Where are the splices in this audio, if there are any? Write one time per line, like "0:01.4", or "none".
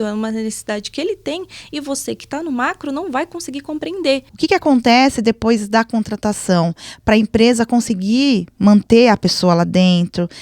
0:04.3